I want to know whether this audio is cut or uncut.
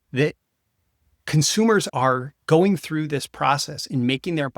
cut